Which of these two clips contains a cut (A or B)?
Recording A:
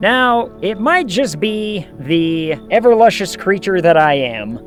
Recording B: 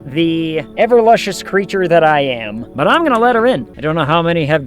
B